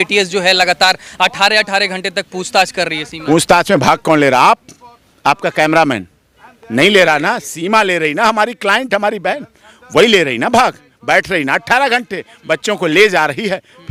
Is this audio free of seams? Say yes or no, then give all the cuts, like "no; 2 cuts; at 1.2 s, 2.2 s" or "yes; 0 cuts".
yes; 0 cuts